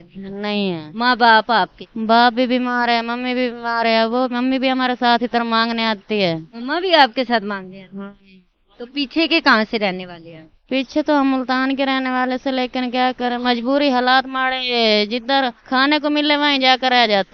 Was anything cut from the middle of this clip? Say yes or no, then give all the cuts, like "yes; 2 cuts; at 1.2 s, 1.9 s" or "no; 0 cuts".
no; 0 cuts